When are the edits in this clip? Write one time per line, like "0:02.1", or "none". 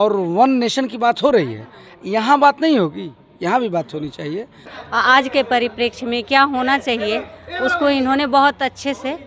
0:04.7